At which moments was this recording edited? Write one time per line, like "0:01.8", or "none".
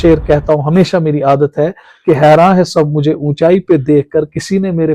none